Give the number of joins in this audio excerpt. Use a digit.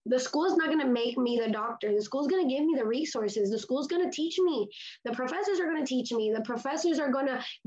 0